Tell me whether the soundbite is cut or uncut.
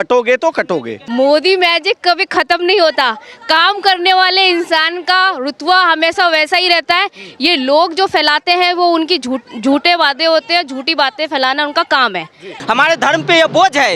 cut